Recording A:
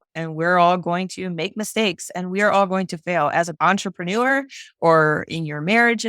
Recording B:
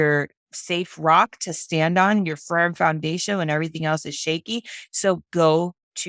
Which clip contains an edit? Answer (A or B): A